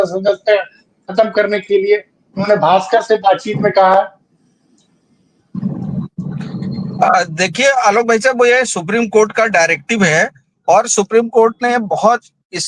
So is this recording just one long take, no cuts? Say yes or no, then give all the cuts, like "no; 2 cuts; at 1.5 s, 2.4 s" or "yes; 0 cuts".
yes; 0 cuts